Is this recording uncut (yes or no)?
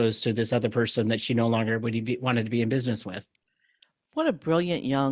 yes